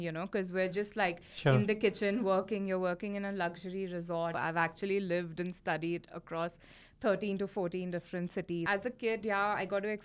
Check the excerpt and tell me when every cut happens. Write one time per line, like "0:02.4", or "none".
0:04.4
0:08.6